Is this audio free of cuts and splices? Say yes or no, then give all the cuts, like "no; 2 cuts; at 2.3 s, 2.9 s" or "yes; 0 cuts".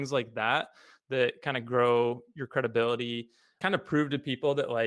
no; 1 cut; at 3.5 s